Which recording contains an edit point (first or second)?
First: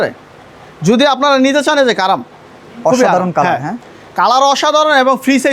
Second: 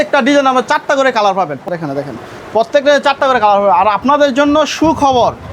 second